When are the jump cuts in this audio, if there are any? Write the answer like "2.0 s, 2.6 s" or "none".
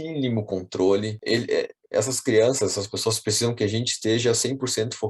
1.2 s